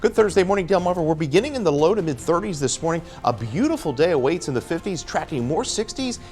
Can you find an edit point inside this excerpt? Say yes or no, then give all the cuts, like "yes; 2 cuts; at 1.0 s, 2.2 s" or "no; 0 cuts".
no; 0 cuts